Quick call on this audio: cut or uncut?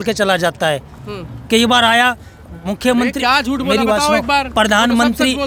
uncut